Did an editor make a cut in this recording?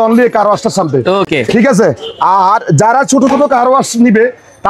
no; 0 cuts

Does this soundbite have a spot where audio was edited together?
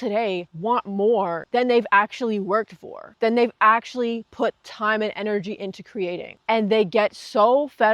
no; 0 cuts

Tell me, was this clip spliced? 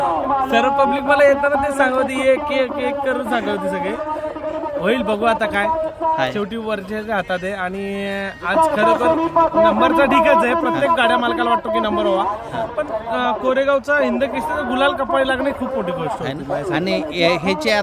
no; 0 cuts

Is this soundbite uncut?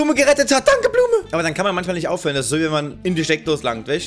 no; 1 cut; at 1.3 s

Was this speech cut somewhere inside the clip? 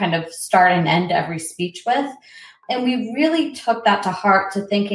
yes; 1 cut; at 2.6 s

